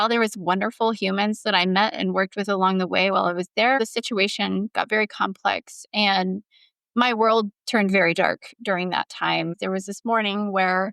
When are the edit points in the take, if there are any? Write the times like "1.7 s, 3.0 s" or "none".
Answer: 3.8 s, 9.5 s